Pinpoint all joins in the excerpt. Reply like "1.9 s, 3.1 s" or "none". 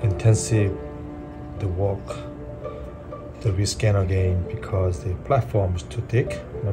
none